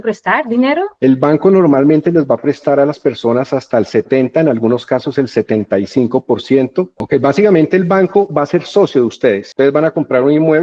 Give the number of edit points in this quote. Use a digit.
2